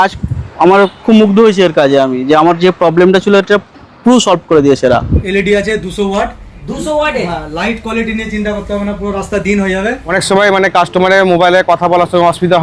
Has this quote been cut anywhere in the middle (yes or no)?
yes